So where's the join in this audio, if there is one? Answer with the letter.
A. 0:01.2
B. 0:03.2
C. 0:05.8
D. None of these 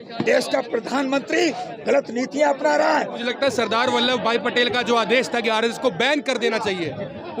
B